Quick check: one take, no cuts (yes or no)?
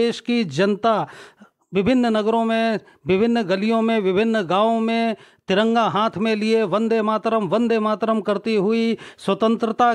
yes